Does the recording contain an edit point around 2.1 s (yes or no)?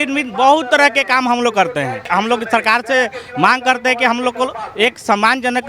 yes